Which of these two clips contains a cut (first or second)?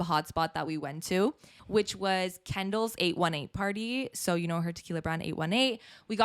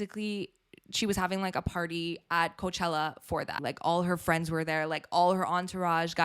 second